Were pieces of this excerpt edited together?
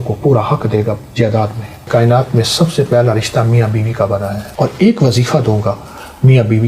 yes; 2 cuts; at 1.9 s, 4.5 s

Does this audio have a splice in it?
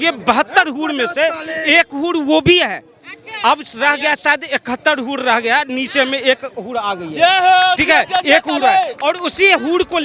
no; 0 cuts

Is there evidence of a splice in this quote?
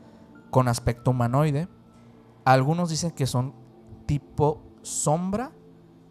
no; 0 cuts

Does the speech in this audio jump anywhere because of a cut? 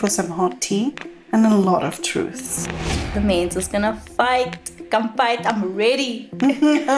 yes; 1 cut; at 2.7 s

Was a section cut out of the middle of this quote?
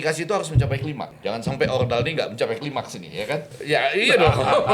yes; 2 cuts; at 1.1 s, 3.5 s

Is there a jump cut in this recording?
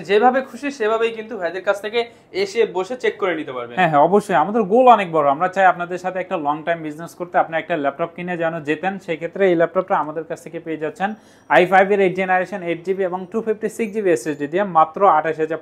no; 0 cuts

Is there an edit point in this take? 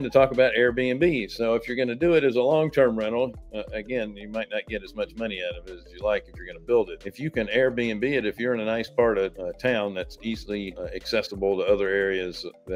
yes; 3 cuts; at 7.0 s, 9.4 s, 10.8 s

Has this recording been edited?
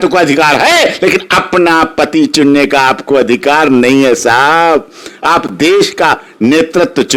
no; 0 cuts

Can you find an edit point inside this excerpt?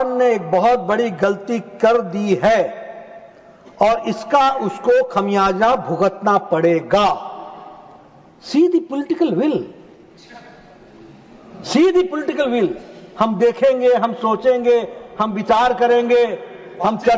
no; 0 cuts

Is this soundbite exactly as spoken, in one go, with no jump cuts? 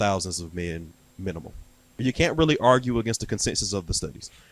no; 1 cut; at 2.0 s

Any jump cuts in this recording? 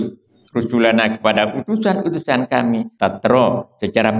yes; 1 cut; at 2.9 s

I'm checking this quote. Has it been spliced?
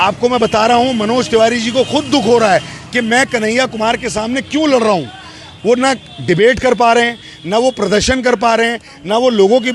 no; 0 cuts

